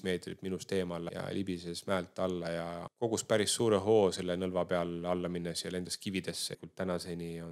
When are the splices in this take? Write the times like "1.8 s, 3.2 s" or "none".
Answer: 1.1 s, 2.9 s, 6.5 s